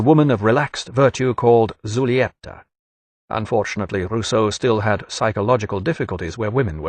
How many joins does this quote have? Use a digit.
1